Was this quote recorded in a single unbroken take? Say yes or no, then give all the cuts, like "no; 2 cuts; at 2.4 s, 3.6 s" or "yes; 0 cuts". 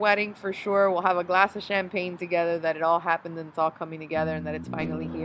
yes; 0 cuts